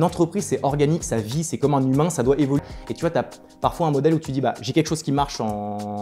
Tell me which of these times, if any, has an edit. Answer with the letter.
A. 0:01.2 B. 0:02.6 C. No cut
B